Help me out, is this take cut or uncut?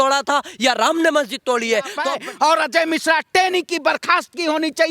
cut